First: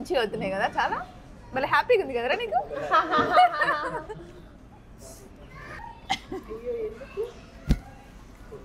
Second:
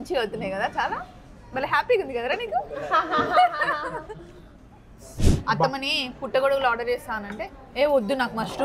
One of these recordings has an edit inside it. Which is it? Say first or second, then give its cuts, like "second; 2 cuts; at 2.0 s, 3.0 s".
second; 1 cut; at 5.3 s